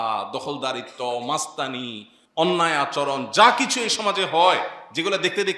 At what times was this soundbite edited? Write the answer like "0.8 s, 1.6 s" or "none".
none